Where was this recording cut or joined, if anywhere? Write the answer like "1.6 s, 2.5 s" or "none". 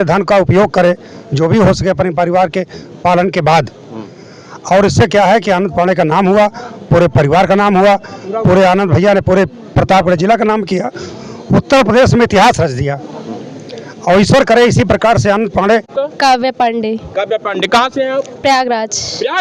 15.9 s

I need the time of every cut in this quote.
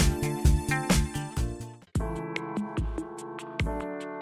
none

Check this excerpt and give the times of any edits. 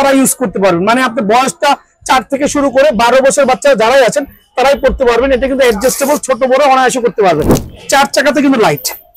7.5 s

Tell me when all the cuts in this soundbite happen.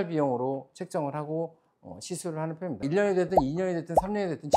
2.8 s

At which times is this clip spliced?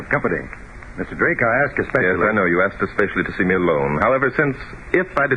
none

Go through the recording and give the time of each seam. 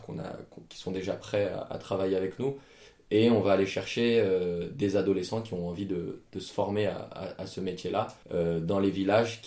8.2 s

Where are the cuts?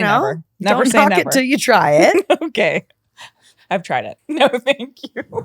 4.1 s

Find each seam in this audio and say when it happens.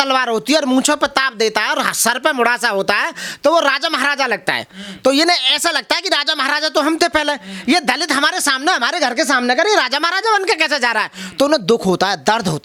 none

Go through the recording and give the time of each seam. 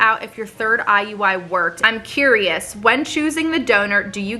1.8 s

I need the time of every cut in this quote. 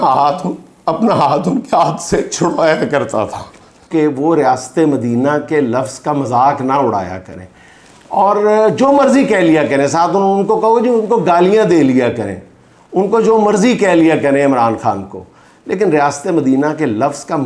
3.9 s

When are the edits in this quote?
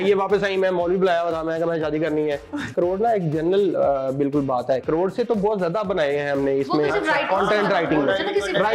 2.7 s

